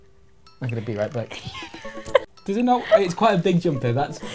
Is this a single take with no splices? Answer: no; 1 cut; at 2.3 s

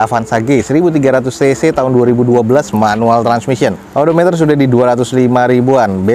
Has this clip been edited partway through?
no; 0 cuts

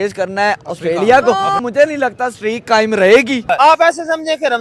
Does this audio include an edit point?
yes; 2 cuts; at 1.6 s, 3.5 s

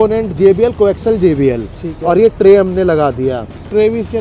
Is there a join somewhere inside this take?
no; 0 cuts

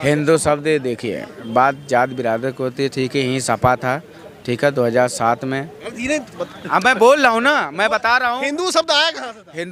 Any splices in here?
no; 0 cuts

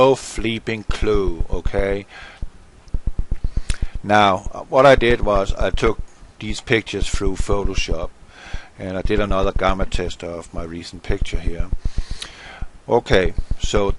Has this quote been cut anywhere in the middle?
yes; 1 cut; at 11.2 s

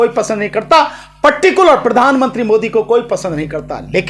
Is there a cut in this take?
no; 0 cuts

